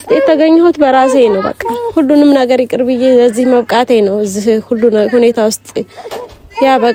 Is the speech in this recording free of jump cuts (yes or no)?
yes